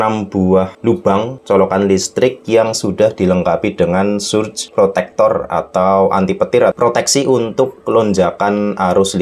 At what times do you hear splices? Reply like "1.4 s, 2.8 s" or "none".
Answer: 1.0 s, 4.6 s, 6.7 s